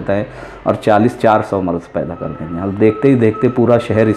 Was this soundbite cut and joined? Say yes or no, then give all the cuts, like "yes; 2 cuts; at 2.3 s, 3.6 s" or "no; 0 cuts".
no; 0 cuts